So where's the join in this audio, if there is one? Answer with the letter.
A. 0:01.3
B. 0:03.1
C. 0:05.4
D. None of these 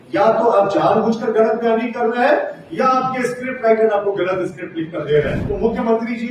C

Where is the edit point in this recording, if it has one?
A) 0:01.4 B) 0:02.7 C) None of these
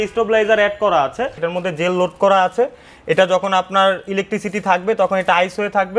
A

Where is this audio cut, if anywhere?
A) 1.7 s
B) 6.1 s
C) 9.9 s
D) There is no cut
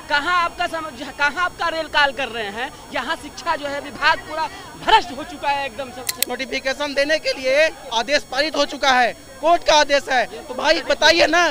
B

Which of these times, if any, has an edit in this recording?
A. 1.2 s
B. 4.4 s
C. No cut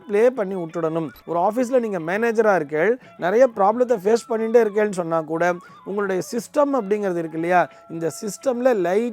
A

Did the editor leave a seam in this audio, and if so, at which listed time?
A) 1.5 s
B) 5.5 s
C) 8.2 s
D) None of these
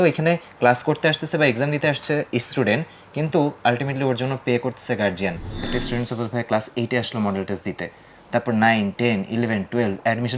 B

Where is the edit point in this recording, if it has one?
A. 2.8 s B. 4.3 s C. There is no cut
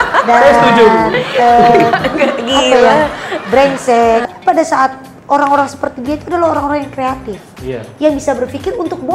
B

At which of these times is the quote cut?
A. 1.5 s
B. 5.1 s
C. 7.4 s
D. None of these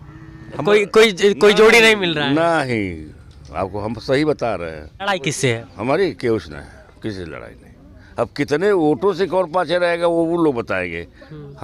B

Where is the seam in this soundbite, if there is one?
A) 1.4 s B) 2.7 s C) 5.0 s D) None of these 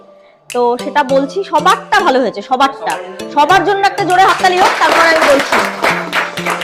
D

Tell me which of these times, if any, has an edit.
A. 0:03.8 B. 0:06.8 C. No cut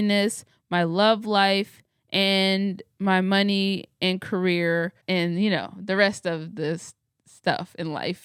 C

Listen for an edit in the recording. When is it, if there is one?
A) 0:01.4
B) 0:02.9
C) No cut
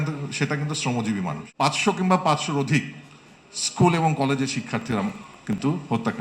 A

